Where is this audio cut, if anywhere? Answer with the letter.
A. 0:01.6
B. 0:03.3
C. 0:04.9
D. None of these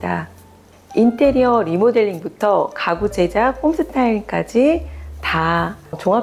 D